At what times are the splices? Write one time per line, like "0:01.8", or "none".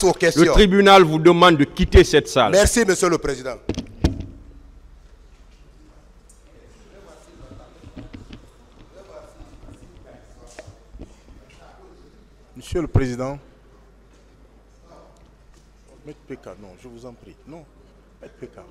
none